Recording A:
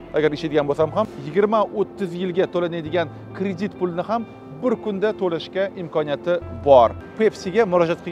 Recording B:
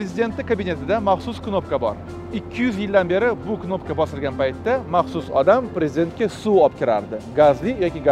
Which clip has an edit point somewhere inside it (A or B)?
A